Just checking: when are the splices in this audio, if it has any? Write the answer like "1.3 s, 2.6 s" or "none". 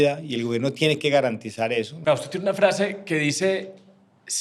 1.9 s